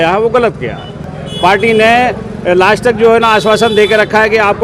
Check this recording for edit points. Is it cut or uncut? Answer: uncut